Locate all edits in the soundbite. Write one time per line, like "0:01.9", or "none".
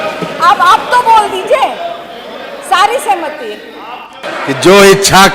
0:04.2